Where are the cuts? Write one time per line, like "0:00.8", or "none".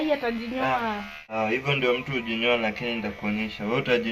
0:01.3